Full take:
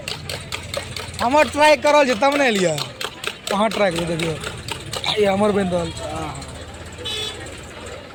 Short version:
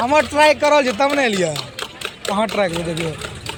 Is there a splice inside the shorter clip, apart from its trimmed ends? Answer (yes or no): no